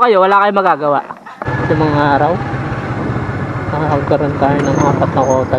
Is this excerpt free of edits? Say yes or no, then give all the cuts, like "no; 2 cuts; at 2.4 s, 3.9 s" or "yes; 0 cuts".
no; 1 cut; at 1.5 s